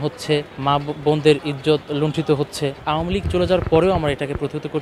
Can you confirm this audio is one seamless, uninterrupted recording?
no; 1 cut; at 2.8 s

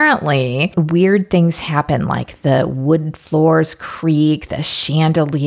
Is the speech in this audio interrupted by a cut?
no; 0 cuts

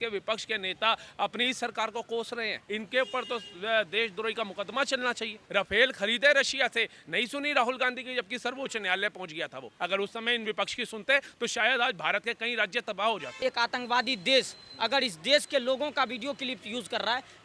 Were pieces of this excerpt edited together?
yes; 4 cuts; at 2.6 s, 5.4 s, 9.6 s, 13.4 s

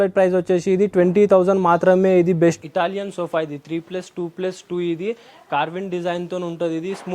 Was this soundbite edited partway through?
yes; 1 cut; at 2.6 s

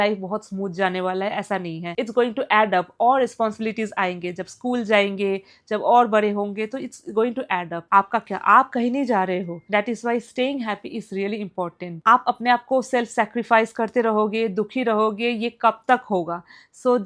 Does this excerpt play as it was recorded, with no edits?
yes; 0 cuts

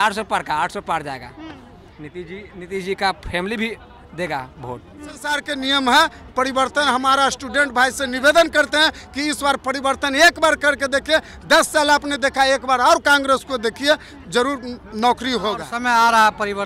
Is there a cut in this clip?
yes; 2 cuts; at 5.4 s, 15.7 s

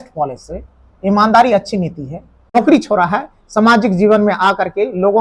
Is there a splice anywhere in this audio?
yes; 1 cut; at 2.5 s

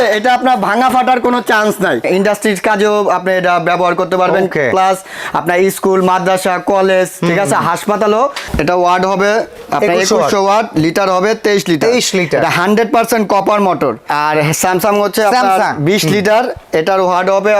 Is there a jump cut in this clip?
yes; 3 cuts; at 2.0 s, 8.4 s, 14.1 s

